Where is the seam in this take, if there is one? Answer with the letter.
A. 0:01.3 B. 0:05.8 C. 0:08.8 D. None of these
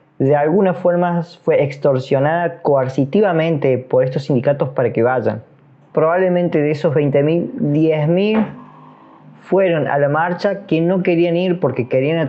B